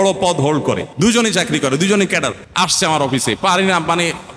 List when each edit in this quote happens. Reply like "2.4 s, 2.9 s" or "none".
0.9 s, 2.4 s